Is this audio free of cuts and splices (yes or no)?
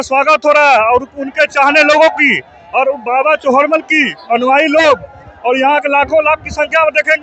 yes